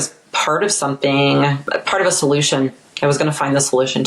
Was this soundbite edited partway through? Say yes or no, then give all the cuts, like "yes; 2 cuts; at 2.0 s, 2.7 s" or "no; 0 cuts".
yes; 1 cut; at 1.6 s